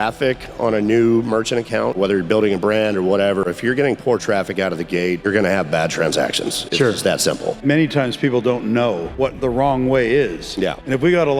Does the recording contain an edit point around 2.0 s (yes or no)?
yes